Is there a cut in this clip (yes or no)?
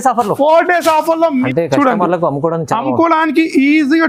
yes